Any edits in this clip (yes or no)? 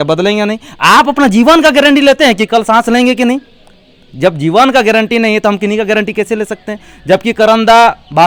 no